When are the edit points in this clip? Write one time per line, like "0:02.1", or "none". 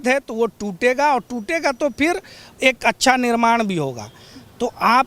none